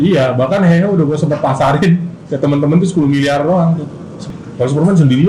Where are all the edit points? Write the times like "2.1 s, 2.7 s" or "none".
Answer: 4.1 s